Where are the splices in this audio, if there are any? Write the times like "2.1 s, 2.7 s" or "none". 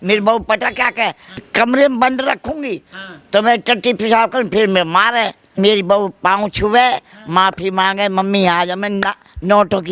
1.5 s, 5.5 s